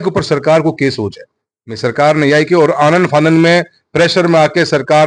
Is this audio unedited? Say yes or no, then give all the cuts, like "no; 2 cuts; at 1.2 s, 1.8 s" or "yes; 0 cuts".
yes; 0 cuts